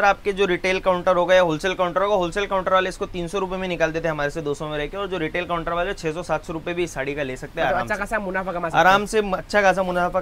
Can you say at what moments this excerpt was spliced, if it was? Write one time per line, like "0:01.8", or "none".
none